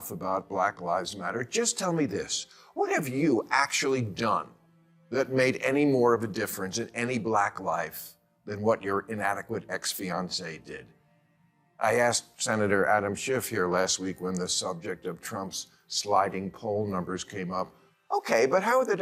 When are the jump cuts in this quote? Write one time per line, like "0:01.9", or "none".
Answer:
none